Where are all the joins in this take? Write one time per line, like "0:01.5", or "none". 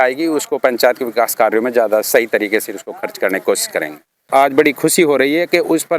0:04.3